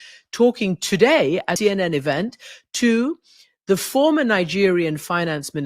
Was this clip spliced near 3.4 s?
no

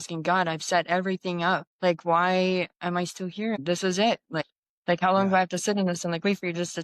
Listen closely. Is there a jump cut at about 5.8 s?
no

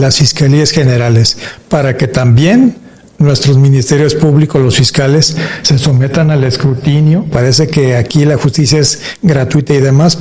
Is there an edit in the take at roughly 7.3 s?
yes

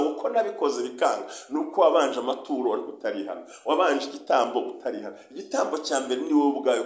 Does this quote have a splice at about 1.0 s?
no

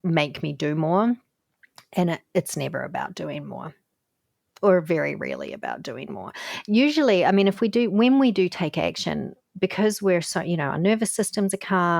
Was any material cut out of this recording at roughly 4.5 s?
no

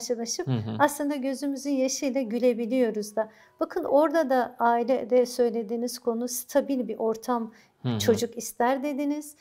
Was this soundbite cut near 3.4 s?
no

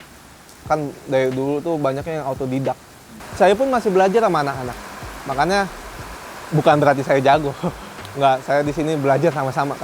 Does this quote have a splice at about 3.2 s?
yes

